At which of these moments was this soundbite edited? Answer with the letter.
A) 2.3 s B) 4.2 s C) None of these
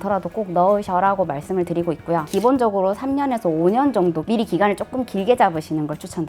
A